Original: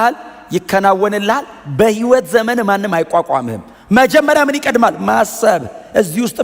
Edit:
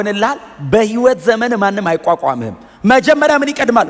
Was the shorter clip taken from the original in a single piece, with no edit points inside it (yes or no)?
yes